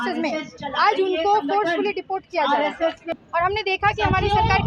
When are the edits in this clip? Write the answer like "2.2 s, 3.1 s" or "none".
3.0 s